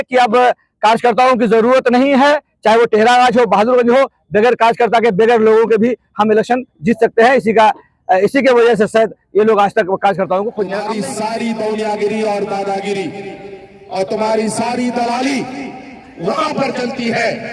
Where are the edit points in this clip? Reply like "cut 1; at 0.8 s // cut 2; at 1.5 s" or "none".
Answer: cut 1; at 10.8 s